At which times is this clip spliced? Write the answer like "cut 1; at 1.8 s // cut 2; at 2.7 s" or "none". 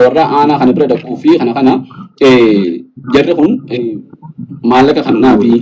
none